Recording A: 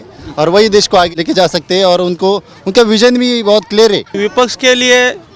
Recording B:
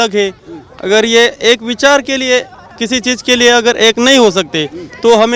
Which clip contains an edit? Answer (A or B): A